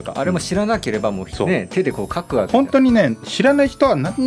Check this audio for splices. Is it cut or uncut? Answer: cut